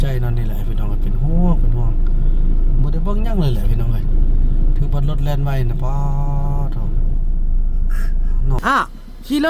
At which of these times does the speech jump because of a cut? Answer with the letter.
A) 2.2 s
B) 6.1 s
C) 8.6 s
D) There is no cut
C